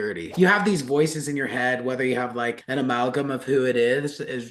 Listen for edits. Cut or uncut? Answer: uncut